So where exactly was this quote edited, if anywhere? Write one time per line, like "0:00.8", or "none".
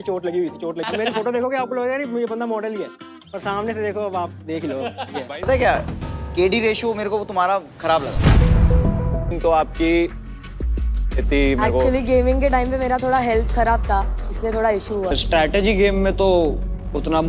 0:00.8
0:05.4
0:09.3
0:15.1